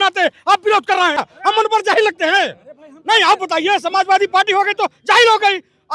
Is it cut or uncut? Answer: cut